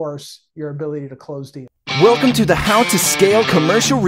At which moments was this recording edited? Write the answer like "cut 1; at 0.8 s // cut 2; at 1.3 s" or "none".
cut 1; at 1.7 s